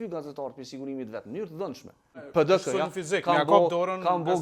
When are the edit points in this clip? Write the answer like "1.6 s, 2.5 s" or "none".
2.3 s